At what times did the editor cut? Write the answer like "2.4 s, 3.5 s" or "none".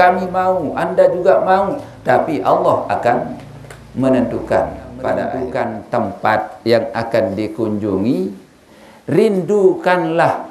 5.4 s